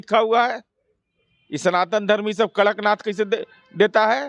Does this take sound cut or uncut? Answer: uncut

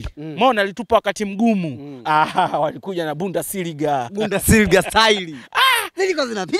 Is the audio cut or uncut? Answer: uncut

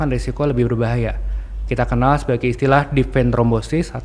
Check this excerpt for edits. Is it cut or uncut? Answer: uncut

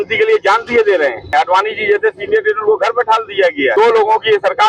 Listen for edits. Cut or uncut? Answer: cut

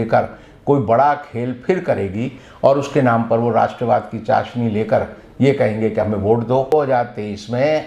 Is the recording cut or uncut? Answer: cut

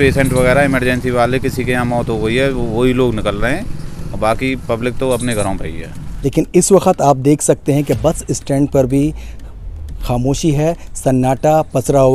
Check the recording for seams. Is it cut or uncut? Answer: cut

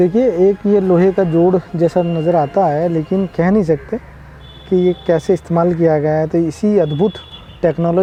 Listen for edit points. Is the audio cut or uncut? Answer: uncut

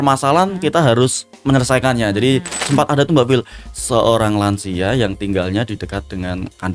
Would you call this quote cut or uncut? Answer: cut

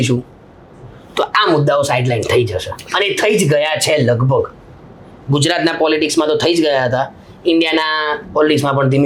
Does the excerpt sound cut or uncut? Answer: uncut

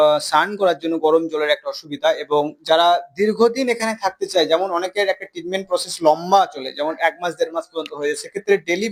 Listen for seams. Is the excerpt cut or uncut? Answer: uncut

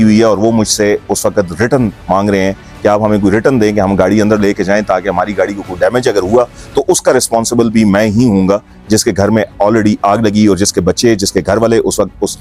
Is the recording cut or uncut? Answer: uncut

